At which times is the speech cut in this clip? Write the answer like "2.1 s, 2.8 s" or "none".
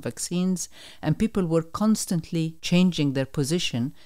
2.6 s